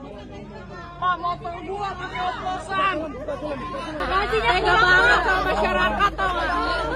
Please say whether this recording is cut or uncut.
cut